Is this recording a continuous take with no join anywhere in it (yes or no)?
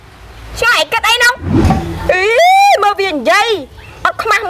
no